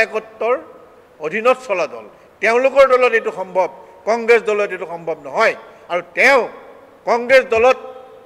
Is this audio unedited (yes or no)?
yes